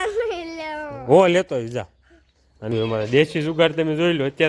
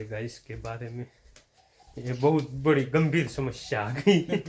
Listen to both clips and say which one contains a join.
first; 1 cut; at 2.7 s

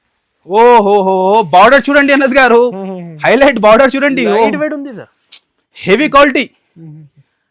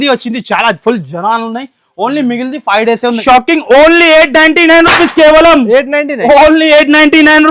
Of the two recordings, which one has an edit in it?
second; 1 cut; at 3.2 s

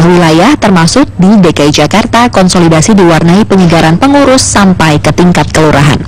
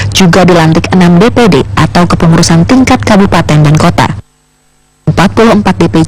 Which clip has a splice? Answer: second; 1 cut; at 4.5 s

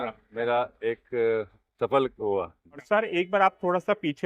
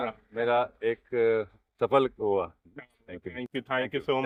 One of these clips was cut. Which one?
first; 1 cut; at 2.8 s

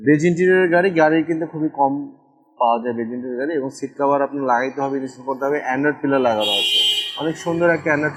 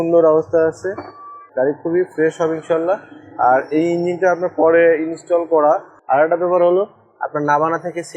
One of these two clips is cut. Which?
second; 1 cut; at 5.9 s

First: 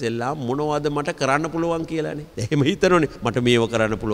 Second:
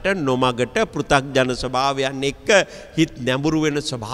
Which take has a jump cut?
first; 2 cuts; at 2.3 s, 3.2 s

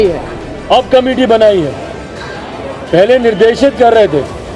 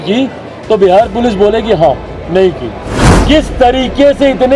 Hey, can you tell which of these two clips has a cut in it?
second; 1 cut; at 2.9 s

